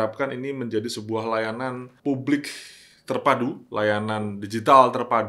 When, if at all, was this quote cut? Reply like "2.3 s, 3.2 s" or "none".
1.9 s